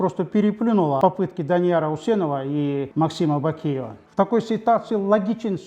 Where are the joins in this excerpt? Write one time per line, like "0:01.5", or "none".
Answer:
0:01.0
0:02.9
0:04.0